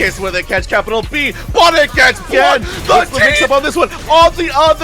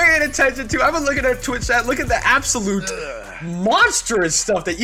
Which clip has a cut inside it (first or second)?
first